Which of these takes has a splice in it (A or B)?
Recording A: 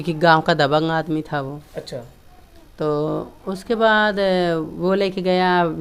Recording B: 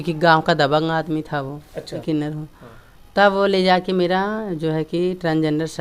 B